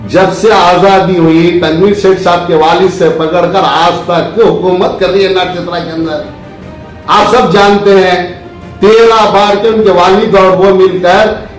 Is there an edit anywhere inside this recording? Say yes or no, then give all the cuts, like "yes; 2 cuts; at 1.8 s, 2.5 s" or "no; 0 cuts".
no; 0 cuts